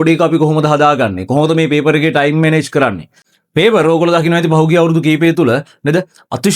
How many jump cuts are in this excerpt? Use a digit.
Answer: 1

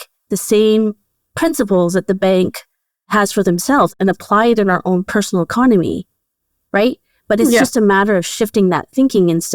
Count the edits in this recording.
0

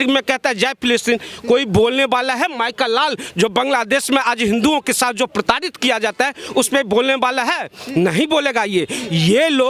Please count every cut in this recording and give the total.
0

